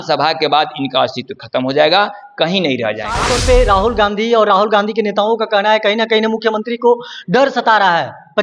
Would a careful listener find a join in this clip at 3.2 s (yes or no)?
yes